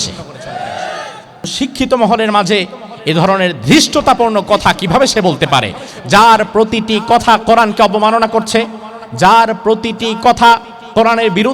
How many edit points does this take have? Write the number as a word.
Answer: one